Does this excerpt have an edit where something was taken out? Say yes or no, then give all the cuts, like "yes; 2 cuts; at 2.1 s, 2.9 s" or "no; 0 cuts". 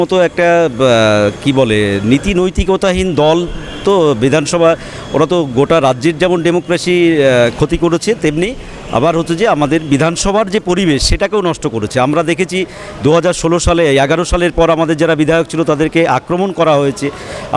no; 0 cuts